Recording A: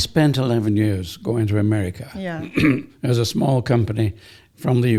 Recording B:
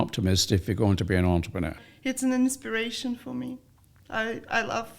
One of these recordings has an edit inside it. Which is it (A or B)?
B